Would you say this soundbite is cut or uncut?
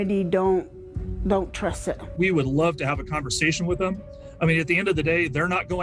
cut